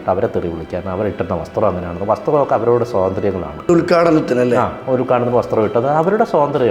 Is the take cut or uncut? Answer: cut